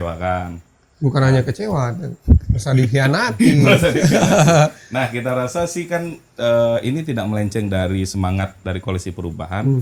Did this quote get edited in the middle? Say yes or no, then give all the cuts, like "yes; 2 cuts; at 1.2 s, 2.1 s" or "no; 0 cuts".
no; 0 cuts